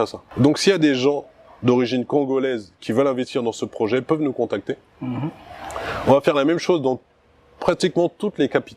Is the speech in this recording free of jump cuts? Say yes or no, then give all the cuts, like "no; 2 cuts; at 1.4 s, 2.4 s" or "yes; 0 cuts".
yes; 0 cuts